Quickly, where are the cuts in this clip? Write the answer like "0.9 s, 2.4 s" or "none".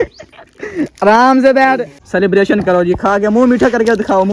2.0 s